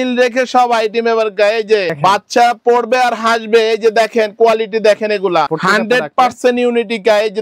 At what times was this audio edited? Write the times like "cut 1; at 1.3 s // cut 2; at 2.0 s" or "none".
cut 1; at 1.9 s // cut 2; at 5.5 s